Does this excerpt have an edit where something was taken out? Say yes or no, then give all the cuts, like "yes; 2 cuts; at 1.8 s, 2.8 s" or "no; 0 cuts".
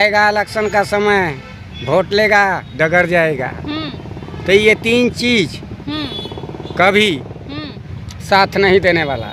no; 0 cuts